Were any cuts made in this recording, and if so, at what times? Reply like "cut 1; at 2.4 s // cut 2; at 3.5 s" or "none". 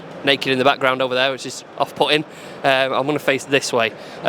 none